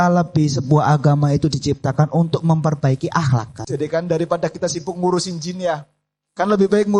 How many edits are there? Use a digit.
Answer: 1